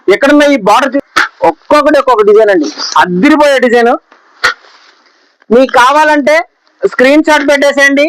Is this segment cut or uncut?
cut